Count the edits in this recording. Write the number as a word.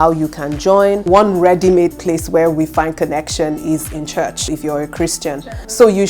two